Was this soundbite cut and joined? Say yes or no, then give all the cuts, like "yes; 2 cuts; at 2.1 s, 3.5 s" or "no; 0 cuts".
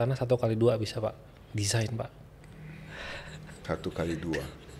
yes; 1 cut; at 2.4 s